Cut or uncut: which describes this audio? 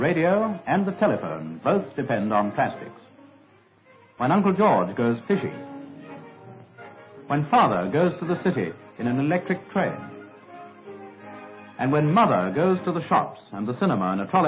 cut